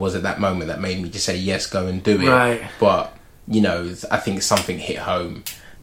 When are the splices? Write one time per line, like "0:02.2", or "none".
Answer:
none